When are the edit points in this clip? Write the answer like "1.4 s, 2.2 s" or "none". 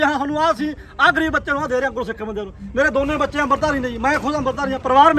none